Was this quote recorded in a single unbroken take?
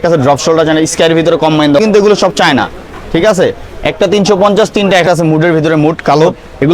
no; 2 cuts; at 1.8 s, 5.0 s

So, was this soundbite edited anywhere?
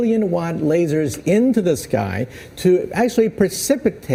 no; 0 cuts

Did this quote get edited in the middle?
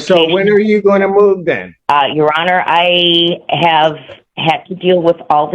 yes; 1 cut; at 1.7 s

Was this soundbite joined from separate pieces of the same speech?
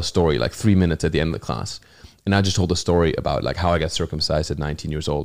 no; 0 cuts

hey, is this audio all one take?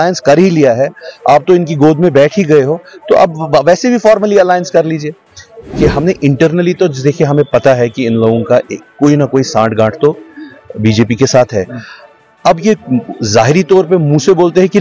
no; 1 cut; at 5.7 s

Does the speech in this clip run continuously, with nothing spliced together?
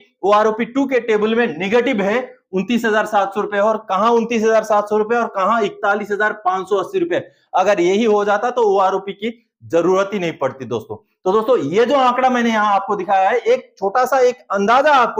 yes; 0 cuts

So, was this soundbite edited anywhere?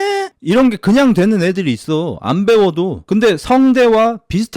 yes; 1 cut; at 3.0 s

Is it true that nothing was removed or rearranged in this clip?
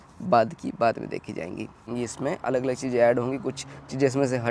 no; 1 cut; at 1.8 s

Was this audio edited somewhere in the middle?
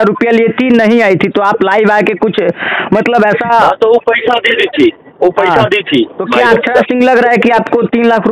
no; 0 cuts

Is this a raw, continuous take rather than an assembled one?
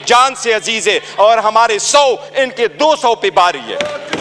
yes; 0 cuts

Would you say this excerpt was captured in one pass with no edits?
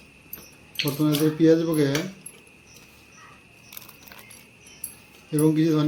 yes; 0 cuts

